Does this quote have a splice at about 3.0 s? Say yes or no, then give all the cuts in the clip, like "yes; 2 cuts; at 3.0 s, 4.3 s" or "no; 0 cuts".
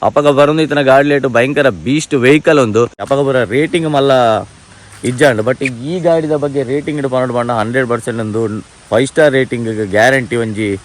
yes; 1 cut; at 3.0 s